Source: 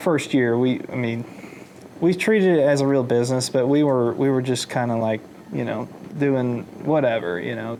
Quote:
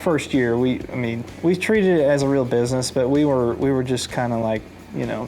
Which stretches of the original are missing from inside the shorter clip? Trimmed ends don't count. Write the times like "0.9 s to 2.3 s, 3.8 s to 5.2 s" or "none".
1.3 s to 1.8 s